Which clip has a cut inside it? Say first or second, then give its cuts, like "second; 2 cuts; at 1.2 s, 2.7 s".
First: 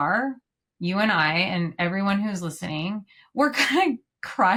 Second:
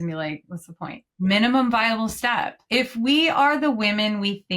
second; 2 cuts; at 1.1 s, 2.6 s